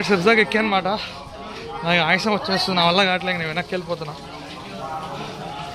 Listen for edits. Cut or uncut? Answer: uncut